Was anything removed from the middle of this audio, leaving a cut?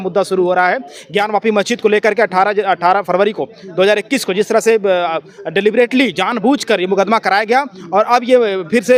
no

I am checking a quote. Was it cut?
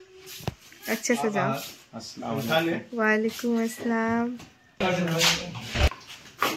yes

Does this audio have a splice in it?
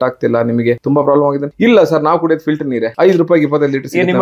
yes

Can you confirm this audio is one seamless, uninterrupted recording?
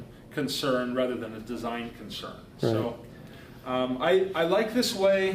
yes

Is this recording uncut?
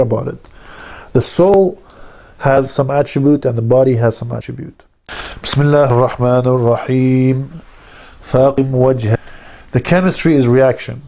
yes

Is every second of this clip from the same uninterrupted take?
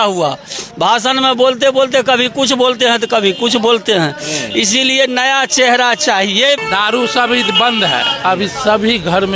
no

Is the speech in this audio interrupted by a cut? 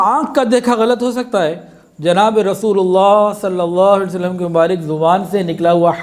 no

